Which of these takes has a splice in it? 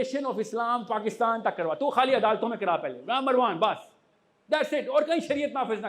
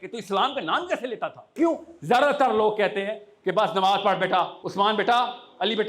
second; 2 cuts; at 1.5 s, 4.6 s

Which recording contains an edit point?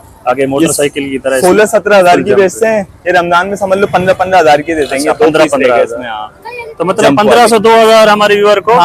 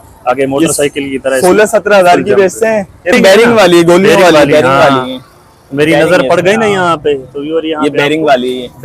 second; 1 cut; at 3.1 s

